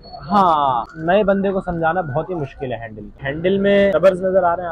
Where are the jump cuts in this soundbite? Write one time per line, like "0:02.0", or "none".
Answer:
0:00.9
0:03.9